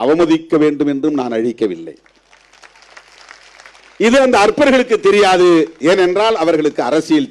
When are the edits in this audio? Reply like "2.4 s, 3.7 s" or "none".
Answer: 3.8 s